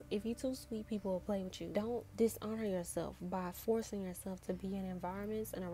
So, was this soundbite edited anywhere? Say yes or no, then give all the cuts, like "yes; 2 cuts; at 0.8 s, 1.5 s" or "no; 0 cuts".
yes; 1 cut; at 1.8 s